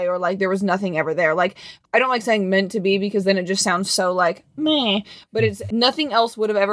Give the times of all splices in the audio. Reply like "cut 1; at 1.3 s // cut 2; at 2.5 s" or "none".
cut 1; at 1.7 s // cut 2; at 5.6 s

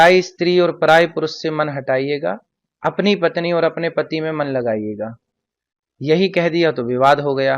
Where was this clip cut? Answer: none

